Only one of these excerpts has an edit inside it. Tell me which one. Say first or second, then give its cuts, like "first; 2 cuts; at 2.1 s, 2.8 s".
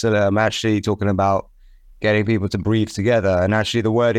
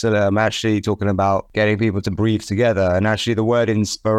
second; 1 cut; at 1.5 s